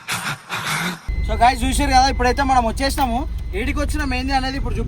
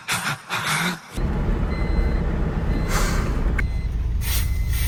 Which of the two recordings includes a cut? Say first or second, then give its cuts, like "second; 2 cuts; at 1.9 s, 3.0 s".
first; 1 cut; at 1.1 s